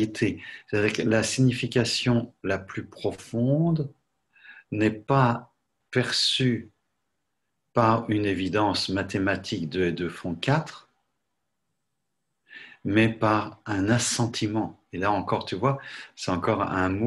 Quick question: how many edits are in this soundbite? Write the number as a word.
one